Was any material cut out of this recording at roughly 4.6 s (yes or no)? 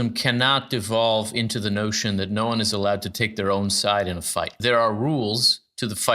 yes